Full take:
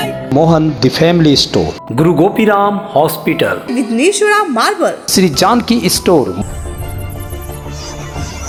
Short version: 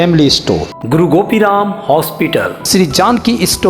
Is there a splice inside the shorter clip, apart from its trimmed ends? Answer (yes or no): yes